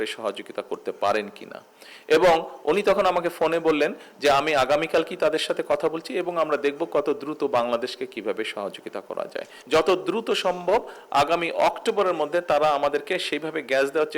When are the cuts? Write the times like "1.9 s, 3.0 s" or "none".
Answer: 9.5 s